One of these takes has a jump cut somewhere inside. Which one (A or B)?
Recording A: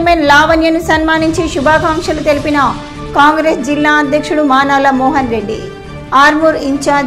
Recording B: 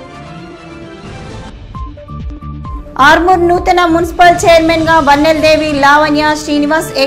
B